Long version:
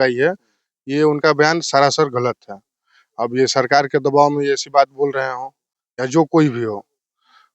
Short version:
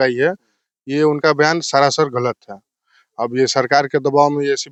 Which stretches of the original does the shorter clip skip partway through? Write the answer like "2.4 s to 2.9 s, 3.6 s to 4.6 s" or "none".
none